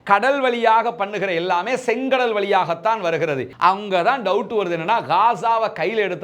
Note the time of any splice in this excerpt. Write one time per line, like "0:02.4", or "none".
0:03.5